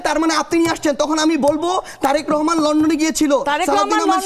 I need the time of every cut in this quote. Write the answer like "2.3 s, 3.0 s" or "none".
none